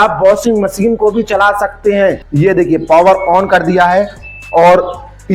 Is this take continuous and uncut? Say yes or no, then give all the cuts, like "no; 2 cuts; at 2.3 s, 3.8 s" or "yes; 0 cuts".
no; 1 cut; at 2.2 s